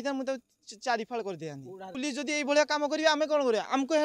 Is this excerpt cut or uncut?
cut